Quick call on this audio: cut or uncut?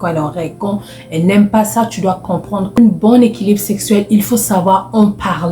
cut